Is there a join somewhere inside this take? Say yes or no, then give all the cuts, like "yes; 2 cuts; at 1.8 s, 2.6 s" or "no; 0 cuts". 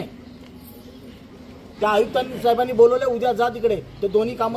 yes; 1 cut; at 1.7 s